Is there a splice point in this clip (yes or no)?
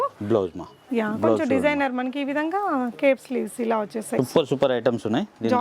yes